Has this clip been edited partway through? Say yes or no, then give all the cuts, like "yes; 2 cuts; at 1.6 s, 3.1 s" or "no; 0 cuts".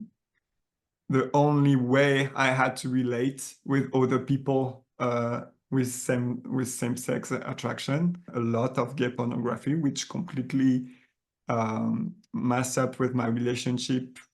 yes; 1 cut; at 8.3 s